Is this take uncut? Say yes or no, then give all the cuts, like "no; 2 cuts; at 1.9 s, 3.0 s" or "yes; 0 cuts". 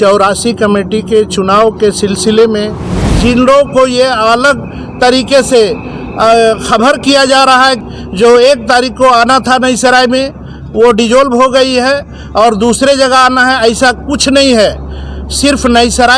no; 2 cuts; at 3.1 s, 7.8 s